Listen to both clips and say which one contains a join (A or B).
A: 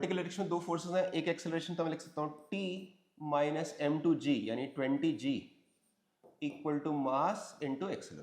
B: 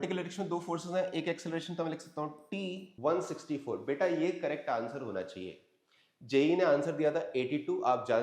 B